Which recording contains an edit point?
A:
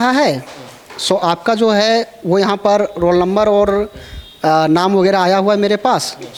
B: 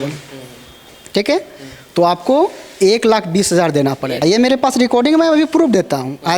B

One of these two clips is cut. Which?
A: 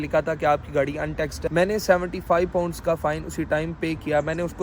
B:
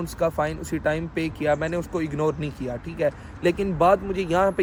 A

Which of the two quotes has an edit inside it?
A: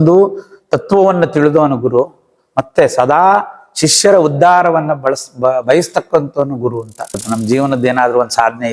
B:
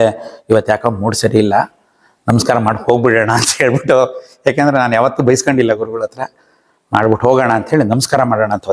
A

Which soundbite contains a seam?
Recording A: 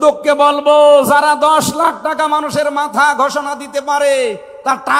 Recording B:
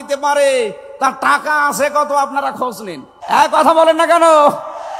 B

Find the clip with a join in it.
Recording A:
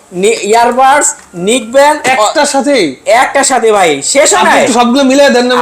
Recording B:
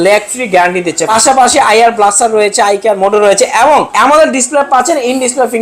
B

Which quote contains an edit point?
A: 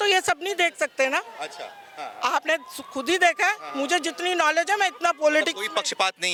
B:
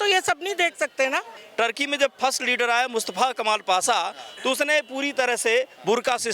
B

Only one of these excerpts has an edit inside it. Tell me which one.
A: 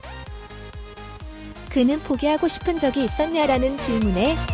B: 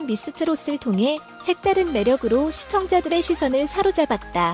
A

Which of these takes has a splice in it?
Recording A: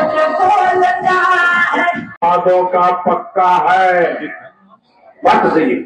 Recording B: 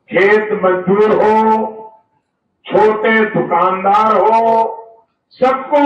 A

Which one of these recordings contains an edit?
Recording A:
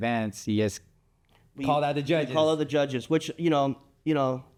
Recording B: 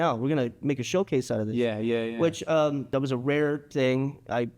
B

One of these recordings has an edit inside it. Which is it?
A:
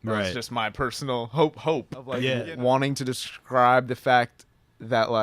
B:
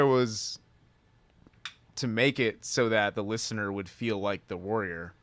A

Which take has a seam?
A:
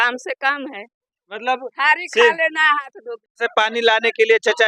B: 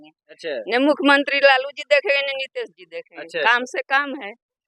A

